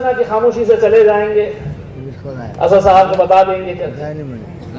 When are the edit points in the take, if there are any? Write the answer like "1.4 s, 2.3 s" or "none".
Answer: none